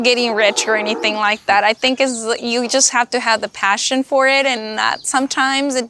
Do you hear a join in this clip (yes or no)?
no